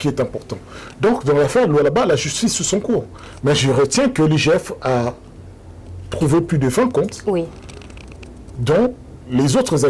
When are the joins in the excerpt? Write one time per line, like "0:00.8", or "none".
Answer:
none